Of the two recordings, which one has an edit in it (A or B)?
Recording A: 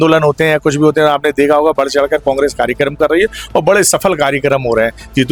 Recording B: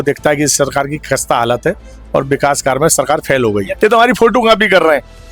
B